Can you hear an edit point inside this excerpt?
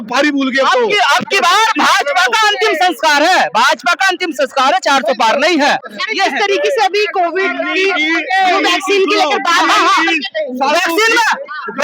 no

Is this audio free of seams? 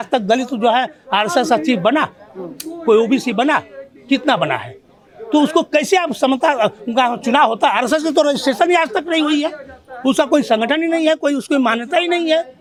yes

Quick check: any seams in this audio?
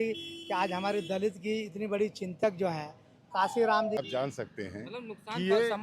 yes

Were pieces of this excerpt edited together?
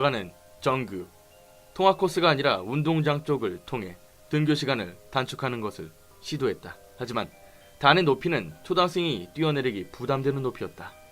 yes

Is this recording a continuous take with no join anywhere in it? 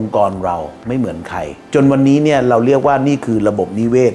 no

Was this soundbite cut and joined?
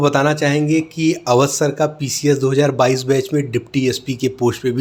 no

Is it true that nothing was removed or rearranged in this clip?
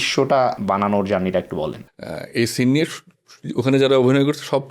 no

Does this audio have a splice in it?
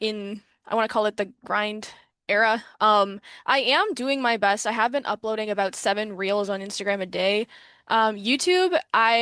no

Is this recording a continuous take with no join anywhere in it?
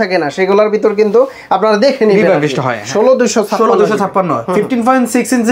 no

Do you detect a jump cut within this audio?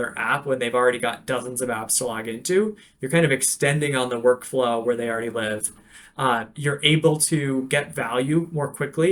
no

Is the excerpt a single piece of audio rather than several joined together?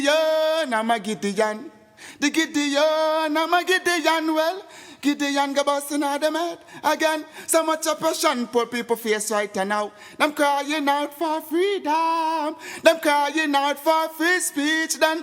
yes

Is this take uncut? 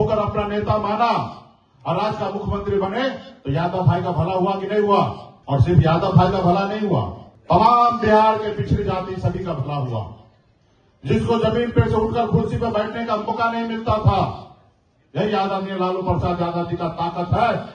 yes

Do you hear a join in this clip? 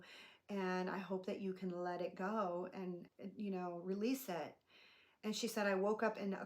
yes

